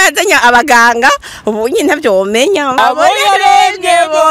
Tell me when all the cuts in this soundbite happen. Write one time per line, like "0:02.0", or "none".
0:02.8